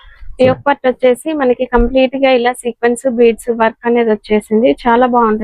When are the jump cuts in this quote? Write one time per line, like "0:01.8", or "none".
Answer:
none